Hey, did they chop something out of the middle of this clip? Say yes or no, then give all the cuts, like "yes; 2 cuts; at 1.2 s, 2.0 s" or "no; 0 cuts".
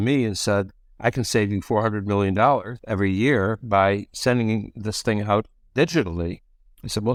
no; 0 cuts